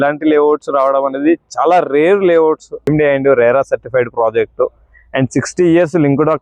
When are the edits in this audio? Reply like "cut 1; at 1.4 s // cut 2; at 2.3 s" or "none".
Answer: cut 1; at 2.8 s

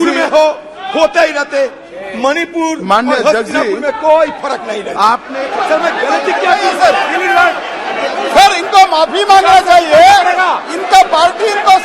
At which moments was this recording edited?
cut 1; at 5.4 s

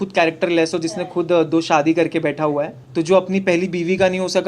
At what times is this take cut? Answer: cut 1; at 2.8 s

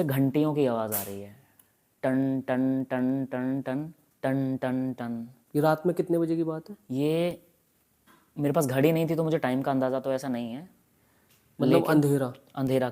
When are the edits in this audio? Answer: none

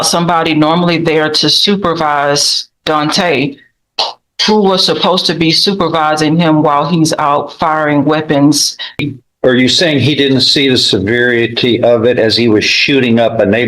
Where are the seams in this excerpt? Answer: cut 1; at 9.0 s

